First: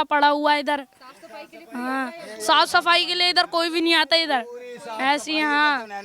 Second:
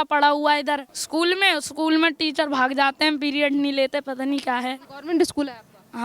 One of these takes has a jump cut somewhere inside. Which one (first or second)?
second